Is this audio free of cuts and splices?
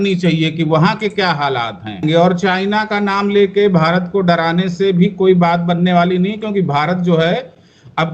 no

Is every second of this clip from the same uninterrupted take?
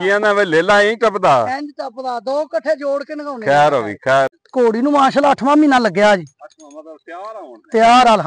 no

